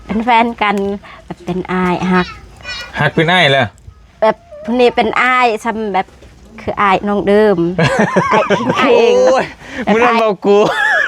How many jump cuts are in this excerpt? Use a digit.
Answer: 1